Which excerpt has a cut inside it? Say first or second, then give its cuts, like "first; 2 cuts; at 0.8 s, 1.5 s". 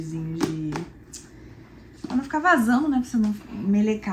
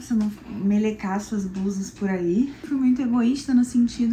second; 1 cut; at 2.7 s